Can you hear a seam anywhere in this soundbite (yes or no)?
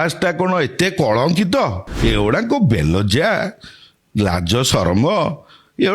yes